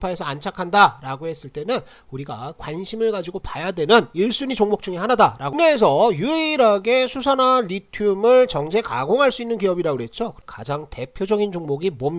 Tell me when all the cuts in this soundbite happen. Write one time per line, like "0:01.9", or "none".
0:05.5
0:10.4